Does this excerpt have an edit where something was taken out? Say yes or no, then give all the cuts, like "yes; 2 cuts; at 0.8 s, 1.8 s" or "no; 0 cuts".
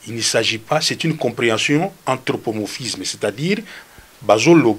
no; 0 cuts